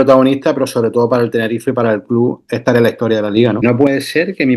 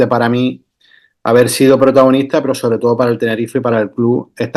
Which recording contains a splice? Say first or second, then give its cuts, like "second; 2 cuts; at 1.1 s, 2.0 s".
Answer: first; 1 cut; at 3.6 s